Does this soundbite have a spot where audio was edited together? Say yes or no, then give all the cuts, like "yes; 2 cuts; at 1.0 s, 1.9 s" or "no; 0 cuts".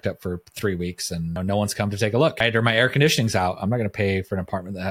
yes; 2 cuts; at 1.4 s, 2.4 s